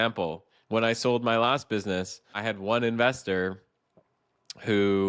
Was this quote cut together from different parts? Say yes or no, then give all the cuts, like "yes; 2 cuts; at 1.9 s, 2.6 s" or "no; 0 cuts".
yes; 1 cut; at 2.3 s